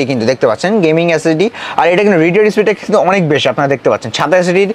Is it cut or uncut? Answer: uncut